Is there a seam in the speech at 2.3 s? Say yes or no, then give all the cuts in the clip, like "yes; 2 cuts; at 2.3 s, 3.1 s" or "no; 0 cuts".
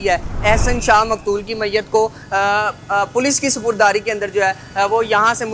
no; 0 cuts